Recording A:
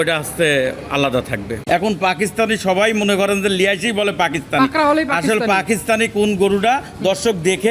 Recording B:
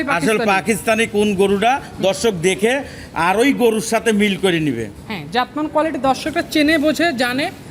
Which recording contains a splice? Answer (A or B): A